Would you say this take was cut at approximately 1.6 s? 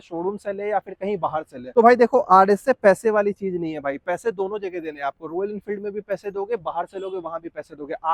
no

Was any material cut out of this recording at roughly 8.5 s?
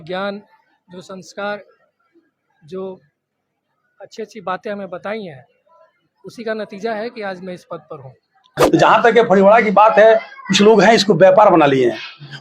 yes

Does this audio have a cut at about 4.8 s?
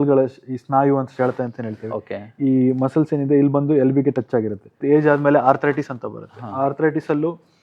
yes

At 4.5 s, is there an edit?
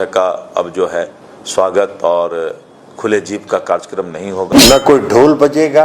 yes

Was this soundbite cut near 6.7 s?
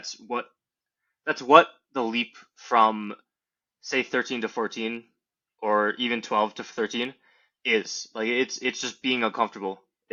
no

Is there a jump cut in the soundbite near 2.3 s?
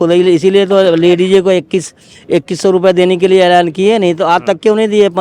no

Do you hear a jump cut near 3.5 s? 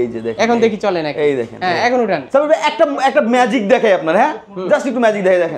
no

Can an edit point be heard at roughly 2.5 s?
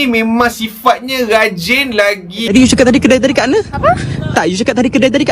yes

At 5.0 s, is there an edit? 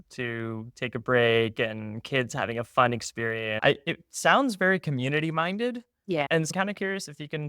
no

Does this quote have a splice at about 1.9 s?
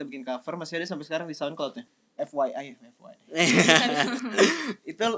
yes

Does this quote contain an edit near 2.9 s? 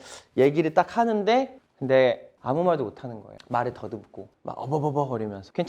no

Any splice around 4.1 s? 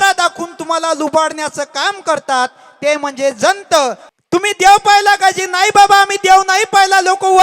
yes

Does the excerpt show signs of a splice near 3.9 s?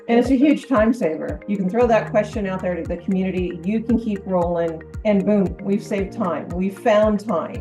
no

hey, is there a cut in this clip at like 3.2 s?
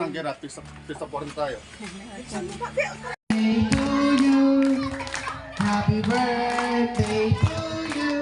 yes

